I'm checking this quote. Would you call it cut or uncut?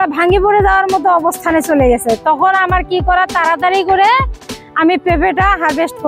uncut